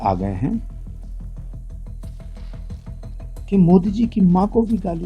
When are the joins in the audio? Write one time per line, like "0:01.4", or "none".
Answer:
0:01.2
0:03.4